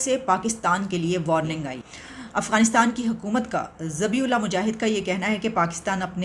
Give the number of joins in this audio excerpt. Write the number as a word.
zero